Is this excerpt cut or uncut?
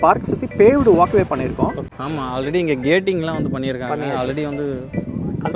cut